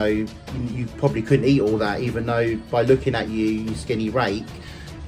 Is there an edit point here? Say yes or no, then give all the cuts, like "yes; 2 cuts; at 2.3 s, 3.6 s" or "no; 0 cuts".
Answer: no; 0 cuts